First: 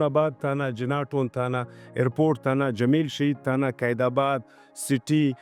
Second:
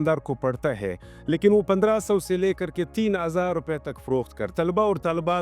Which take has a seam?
second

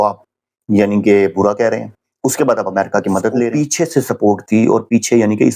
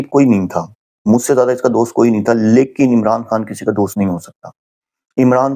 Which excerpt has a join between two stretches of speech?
first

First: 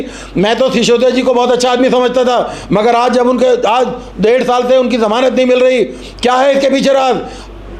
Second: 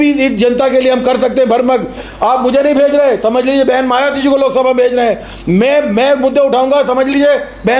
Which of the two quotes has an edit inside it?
second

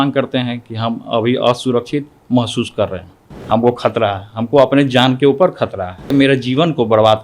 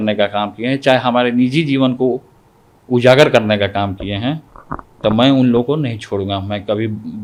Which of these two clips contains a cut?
first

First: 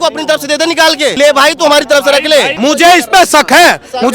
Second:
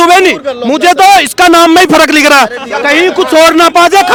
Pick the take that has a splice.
first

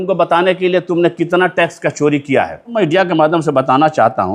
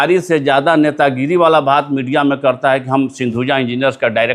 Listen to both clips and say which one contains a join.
first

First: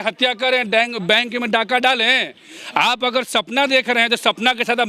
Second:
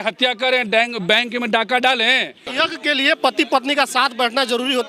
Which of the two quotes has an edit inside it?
second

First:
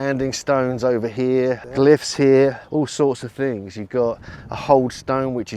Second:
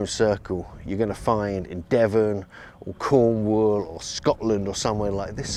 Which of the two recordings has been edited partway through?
first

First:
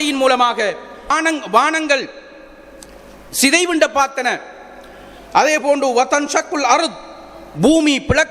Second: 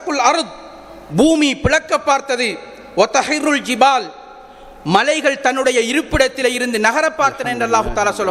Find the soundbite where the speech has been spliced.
first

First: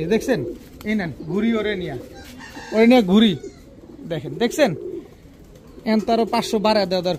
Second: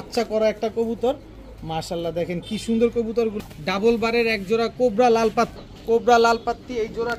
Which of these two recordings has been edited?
second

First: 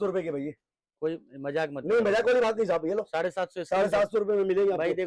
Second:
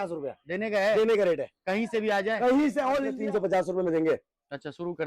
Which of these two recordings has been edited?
second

